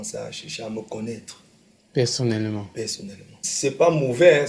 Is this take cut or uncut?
cut